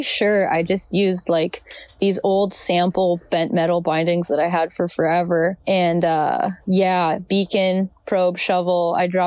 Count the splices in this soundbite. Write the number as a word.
one